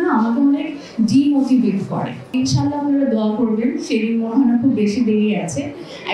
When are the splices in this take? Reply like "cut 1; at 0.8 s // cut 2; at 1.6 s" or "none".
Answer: cut 1; at 2.3 s